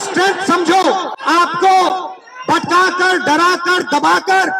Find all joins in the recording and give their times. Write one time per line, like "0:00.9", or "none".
0:01.1